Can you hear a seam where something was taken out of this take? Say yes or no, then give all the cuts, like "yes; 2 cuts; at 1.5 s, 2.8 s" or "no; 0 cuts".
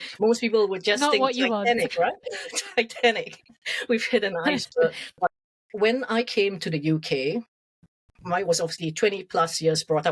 yes; 1 cut; at 5.3 s